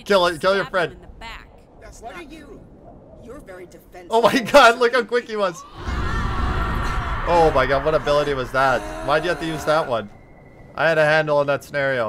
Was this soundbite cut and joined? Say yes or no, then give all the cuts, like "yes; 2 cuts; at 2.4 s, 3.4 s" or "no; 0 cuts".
no; 0 cuts